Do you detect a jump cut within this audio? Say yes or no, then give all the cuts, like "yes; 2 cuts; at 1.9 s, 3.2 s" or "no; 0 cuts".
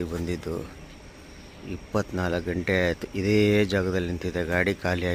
no; 0 cuts